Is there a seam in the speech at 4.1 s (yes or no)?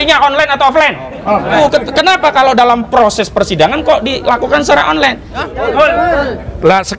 no